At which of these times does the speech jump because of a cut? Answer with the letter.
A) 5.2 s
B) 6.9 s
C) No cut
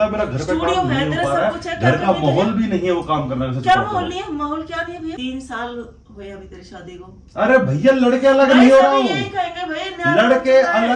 A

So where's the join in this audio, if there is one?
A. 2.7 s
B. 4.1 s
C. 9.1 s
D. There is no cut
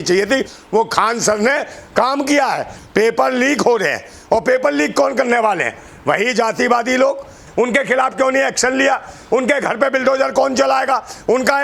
A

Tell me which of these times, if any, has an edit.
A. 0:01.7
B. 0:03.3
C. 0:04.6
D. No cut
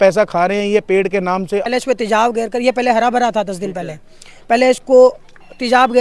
A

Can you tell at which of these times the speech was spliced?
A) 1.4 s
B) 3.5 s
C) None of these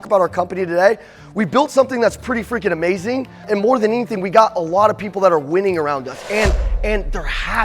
B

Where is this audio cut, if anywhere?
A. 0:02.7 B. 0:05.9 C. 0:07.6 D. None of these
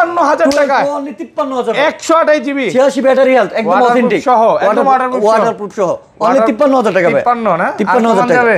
D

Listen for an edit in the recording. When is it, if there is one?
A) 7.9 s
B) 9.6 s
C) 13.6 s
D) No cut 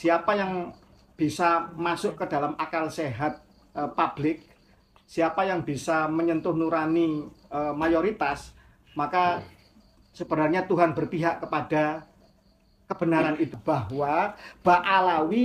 C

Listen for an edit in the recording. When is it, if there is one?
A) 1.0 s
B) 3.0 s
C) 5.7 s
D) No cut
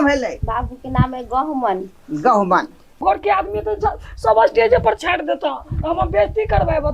B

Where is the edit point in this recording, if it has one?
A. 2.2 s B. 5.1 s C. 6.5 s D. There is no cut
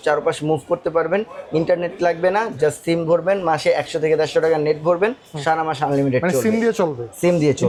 D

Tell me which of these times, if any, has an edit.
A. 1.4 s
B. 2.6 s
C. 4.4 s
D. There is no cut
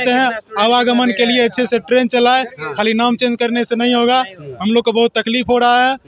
D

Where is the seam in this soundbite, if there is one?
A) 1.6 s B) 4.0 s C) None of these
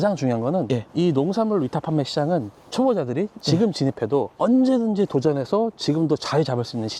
C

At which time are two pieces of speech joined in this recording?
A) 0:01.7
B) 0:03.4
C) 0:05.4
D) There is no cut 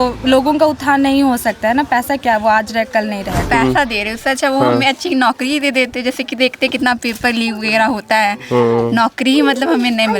B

